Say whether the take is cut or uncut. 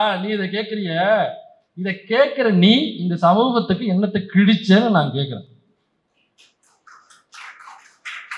uncut